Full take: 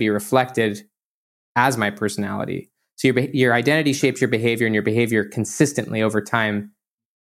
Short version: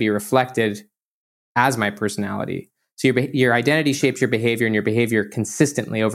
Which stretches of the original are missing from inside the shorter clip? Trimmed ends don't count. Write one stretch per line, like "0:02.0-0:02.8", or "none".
none